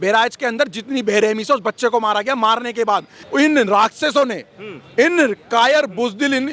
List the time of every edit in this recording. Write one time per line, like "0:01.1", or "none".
0:03.2